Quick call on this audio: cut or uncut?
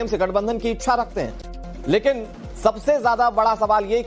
uncut